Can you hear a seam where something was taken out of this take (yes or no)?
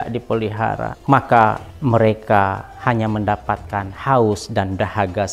yes